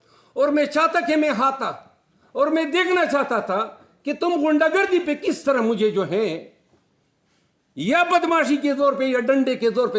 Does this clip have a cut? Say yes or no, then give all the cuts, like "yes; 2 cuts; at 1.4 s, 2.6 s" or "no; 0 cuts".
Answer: no; 0 cuts